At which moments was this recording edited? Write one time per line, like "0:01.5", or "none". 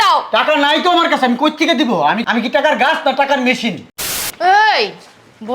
0:03.9